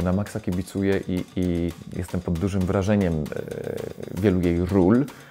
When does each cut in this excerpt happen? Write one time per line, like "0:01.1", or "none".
0:01.9